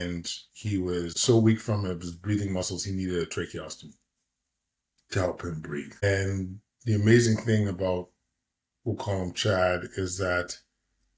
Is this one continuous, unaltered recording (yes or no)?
no